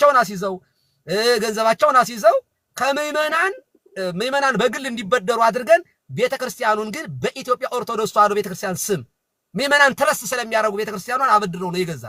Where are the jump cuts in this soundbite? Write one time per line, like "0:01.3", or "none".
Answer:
none